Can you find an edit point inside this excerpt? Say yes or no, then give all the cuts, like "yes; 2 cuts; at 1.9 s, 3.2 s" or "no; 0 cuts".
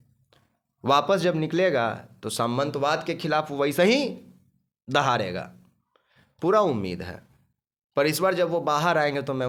no; 0 cuts